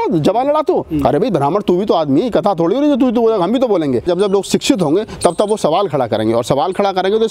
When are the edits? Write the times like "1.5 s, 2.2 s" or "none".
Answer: 4.1 s

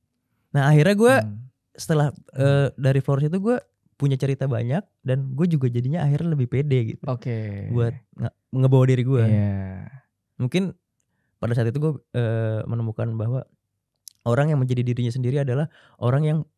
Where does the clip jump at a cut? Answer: none

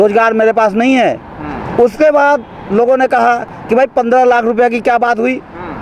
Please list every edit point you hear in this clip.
none

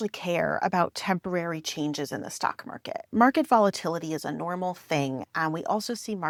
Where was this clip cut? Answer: none

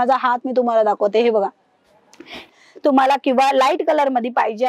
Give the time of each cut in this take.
2.5 s

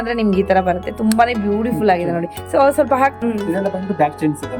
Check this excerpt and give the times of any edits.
3.1 s

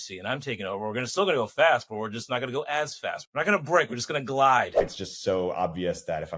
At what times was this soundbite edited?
3.2 s, 4.9 s

